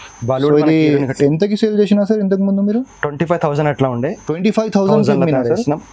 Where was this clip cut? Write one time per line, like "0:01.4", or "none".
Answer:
none